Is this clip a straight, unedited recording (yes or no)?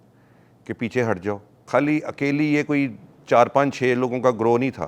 no